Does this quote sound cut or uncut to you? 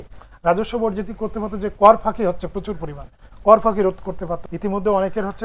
cut